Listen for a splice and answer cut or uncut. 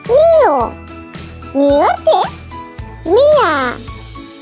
uncut